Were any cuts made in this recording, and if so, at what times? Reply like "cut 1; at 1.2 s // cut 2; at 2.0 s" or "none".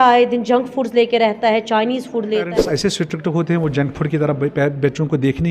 cut 1; at 2.5 s